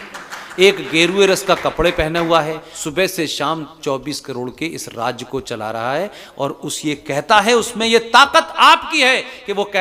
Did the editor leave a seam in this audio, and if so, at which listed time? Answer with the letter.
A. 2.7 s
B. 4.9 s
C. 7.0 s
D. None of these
A